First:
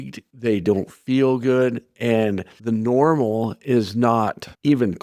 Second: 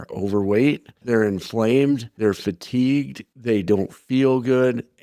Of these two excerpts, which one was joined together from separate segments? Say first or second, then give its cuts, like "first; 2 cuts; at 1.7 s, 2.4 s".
second; 2 cuts; at 0.9 s, 2.1 s